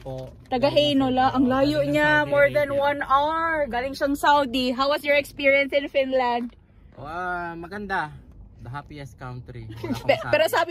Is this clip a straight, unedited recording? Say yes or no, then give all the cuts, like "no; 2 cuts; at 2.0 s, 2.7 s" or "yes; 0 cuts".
yes; 0 cuts